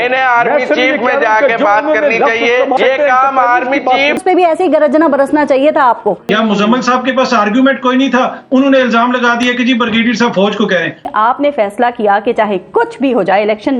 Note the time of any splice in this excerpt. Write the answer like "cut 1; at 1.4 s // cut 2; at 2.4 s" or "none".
cut 1; at 2.8 s // cut 2; at 4.2 s // cut 3; at 6.2 s // cut 4; at 11.1 s